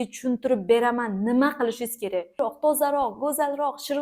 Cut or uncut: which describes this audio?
cut